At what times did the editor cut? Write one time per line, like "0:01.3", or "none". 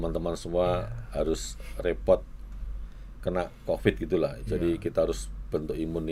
none